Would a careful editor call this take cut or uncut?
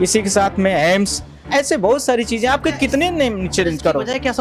uncut